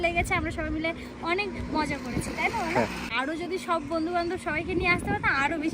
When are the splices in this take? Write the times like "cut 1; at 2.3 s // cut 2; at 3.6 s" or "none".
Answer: cut 1; at 3.1 s